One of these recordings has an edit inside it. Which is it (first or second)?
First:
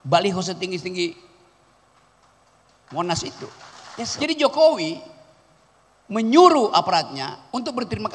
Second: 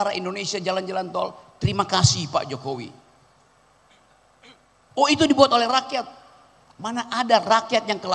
first